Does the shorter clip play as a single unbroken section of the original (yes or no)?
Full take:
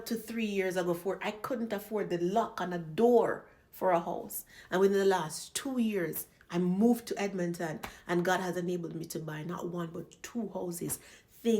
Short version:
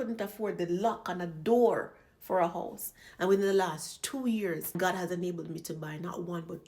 no